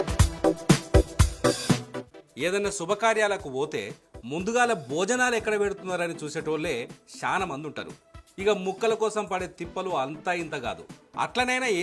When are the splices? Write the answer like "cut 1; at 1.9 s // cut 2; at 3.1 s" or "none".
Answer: cut 1; at 1.8 s